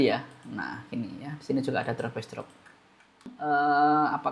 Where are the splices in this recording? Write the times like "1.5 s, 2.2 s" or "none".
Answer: 3.4 s